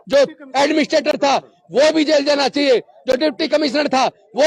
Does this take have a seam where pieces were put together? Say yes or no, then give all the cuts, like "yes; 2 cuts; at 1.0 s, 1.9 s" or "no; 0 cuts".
no; 0 cuts